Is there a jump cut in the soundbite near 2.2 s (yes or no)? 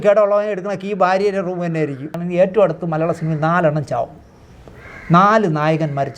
yes